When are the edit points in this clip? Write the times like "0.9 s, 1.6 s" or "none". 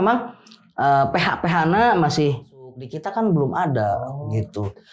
2.9 s